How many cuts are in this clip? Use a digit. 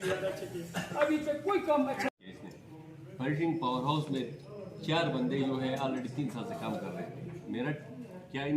1